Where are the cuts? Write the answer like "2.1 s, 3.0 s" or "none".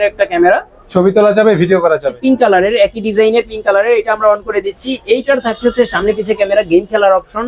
2.1 s